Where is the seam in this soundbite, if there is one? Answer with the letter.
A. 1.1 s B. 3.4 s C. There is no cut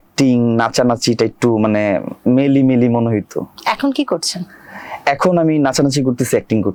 C